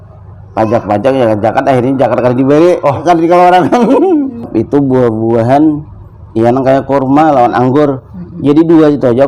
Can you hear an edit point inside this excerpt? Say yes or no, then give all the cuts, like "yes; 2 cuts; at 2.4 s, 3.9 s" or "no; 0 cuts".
yes; 1 cut; at 4.5 s